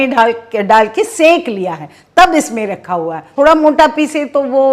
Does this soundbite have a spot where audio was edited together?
yes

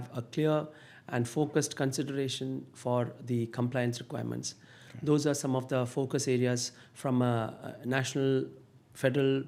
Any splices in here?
no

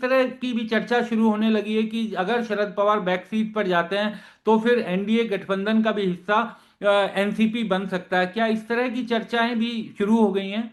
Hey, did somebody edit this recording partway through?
no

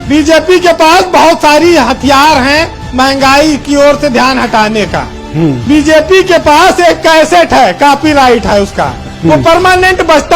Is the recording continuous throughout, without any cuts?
no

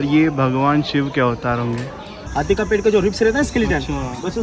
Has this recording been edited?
yes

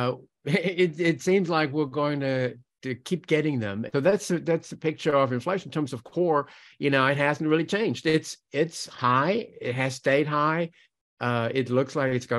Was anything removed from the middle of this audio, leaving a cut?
yes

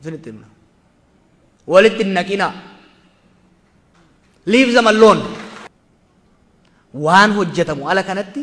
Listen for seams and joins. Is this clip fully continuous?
no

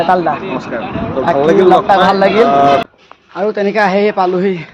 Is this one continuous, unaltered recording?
no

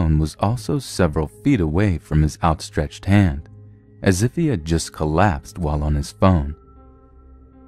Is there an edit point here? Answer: yes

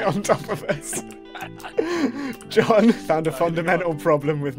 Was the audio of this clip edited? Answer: yes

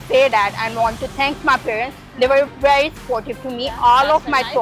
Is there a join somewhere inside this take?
no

